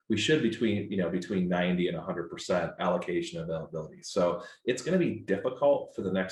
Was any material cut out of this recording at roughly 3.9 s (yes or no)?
no